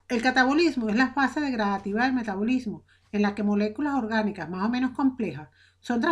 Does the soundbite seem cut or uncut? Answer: uncut